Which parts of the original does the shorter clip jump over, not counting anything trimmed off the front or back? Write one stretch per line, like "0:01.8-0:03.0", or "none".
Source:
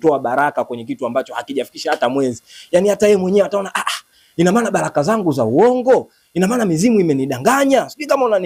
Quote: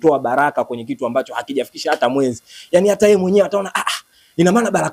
none